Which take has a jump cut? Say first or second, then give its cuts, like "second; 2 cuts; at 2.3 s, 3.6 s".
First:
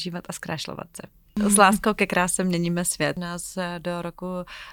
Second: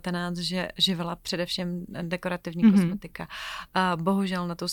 first; 2 cuts; at 1.4 s, 3.2 s